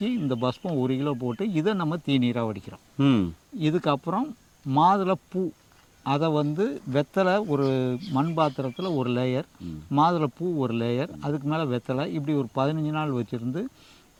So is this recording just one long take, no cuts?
yes; 0 cuts

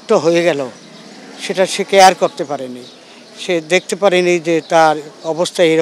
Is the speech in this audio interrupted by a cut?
no; 0 cuts

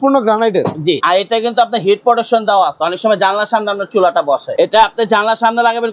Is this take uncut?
no; 2 cuts; at 1.0 s, 4.5 s

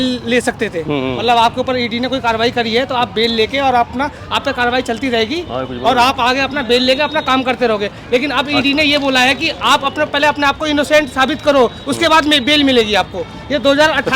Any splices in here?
no; 0 cuts

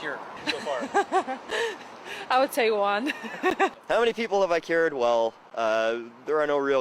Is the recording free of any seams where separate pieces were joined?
yes; 0 cuts

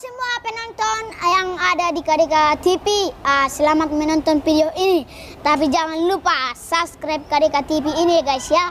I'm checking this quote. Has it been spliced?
no; 0 cuts

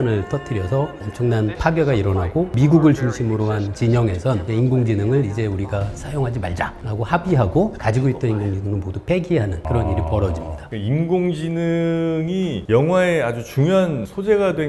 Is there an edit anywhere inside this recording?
no; 0 cuts

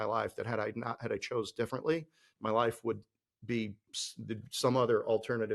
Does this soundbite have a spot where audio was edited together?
no; 0 cuts

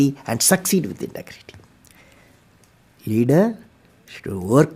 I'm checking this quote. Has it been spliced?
no; 0 cuts

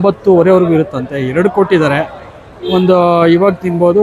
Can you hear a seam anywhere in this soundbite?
no; 0 cuts

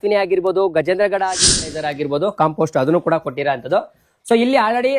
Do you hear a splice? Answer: yes; 1 cut; at 1.6 s

